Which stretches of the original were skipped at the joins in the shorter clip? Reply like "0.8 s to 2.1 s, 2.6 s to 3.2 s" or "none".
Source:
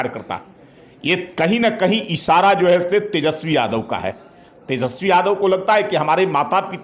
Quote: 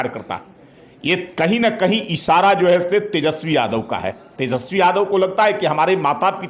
4.2 s to 4.5 s